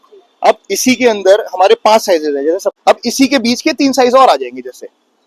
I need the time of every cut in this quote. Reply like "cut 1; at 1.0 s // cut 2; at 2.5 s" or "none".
cut 1; at 2.7 s